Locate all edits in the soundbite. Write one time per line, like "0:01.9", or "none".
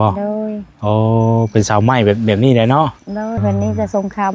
0:03.4